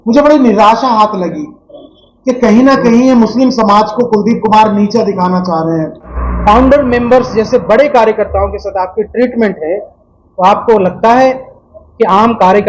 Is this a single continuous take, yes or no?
no